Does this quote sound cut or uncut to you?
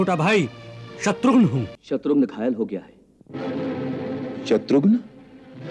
cut